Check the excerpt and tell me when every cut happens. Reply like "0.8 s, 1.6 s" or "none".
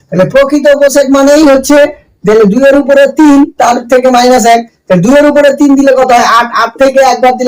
none